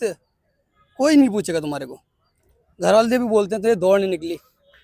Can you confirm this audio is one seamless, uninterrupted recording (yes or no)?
yes